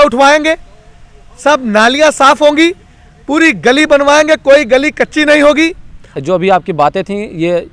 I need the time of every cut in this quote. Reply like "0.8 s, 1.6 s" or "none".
6.2 s